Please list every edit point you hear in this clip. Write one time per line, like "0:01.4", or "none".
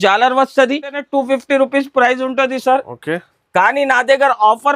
0:01.0